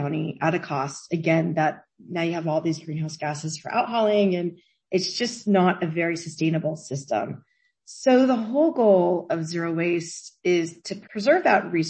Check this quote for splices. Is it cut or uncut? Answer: cut